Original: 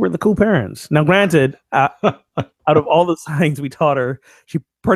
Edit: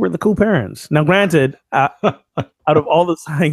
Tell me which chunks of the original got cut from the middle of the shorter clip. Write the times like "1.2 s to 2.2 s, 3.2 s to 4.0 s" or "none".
none